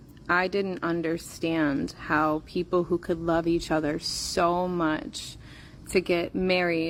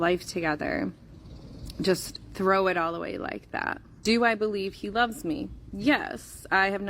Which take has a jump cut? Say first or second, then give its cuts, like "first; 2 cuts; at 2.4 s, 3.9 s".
second; 2 cuts; at 3.9 s, 5.5 s